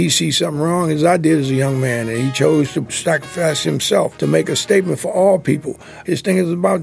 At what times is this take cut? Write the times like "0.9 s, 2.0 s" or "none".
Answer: 2.9 s, 4.1 s, 5.9 s